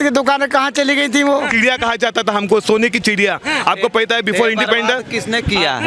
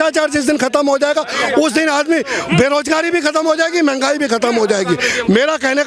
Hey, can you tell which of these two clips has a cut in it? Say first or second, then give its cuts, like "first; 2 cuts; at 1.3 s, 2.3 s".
first; 1 cut; at 1.5 s